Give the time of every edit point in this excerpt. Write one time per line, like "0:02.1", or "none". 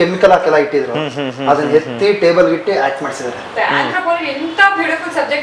0:03.4